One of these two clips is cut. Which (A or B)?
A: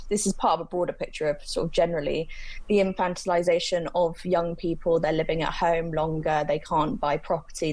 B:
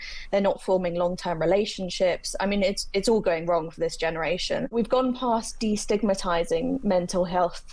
B